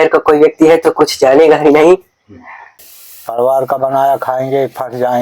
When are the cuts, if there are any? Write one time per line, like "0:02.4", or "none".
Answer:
0:02.9